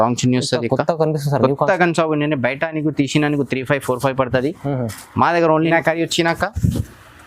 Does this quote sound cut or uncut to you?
cut